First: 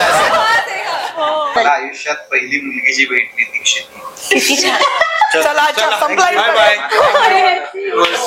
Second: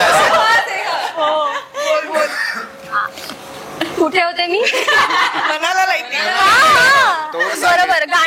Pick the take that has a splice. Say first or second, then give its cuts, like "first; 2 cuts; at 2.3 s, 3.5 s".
first; 1 cut; at 1.5 s